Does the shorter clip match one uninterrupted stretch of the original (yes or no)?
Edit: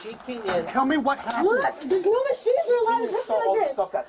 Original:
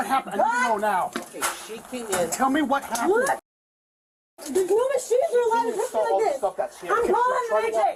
no